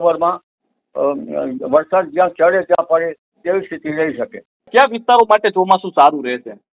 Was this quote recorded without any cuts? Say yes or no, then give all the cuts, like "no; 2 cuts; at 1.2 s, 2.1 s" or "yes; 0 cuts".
no; 1 cut; at 4.7 s